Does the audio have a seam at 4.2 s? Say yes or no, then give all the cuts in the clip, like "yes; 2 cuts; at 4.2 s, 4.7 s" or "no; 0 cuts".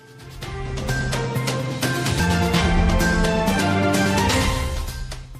no; 1 cut; at 1.1 s